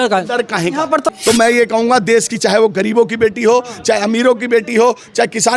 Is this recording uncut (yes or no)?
no